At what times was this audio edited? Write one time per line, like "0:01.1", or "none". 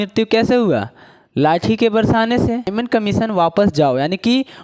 0:02.7